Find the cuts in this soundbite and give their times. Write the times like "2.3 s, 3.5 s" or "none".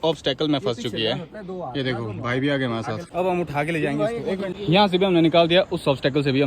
3.0 s, 4.5 s